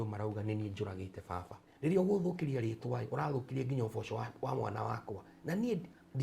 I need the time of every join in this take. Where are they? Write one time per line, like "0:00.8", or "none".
0:01.6